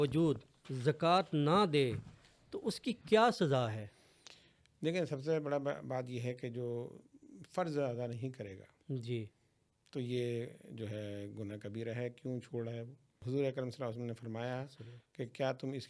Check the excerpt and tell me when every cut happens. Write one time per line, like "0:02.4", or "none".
0:13.1